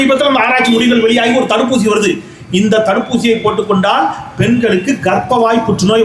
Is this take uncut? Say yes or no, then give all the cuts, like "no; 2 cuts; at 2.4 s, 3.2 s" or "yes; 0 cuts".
yes; 0 cuts